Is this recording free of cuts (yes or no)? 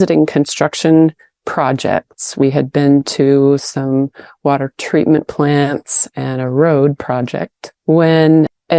yes